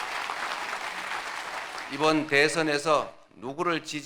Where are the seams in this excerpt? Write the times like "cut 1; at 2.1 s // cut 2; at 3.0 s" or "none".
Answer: cut 1; at 1.8 s